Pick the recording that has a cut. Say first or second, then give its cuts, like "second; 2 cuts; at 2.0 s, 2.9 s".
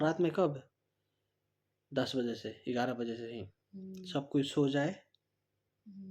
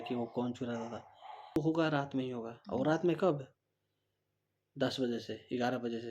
second; 1 cut; at 1.6 s